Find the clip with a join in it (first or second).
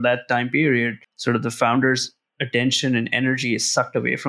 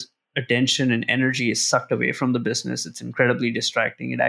first